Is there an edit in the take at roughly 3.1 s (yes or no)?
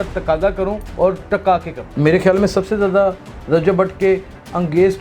no